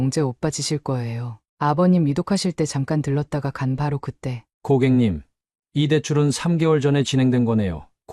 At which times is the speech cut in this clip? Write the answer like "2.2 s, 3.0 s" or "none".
4.5 s